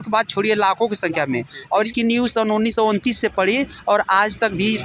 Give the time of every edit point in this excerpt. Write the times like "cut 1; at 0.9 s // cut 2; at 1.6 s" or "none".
cut 1; at 1.9 s